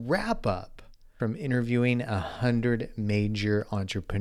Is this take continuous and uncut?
no; 1 cut; at 1.2 s

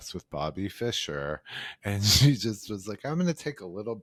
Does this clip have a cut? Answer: no; 0 cuts

